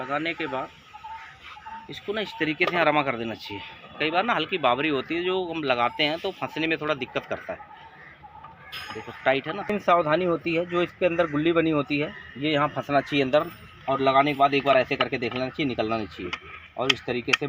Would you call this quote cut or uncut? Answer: cut